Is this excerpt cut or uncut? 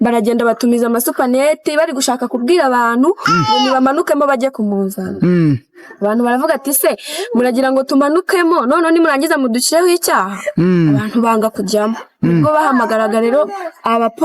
uncut